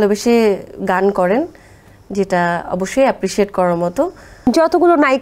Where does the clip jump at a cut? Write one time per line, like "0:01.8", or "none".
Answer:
0:04.3